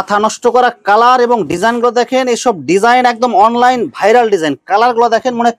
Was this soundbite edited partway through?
no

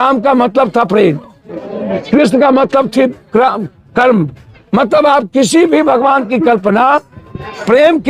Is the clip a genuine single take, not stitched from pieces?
yes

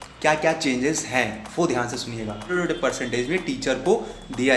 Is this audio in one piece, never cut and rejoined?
no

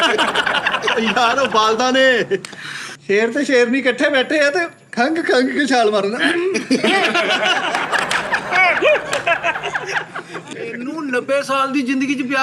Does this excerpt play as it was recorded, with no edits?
no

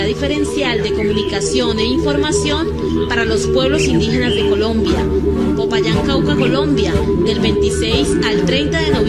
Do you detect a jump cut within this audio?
yes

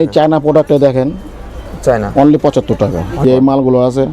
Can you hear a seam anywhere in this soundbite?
yes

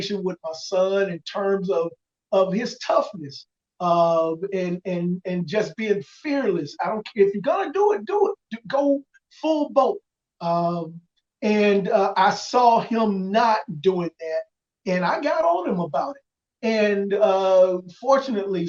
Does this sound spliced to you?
no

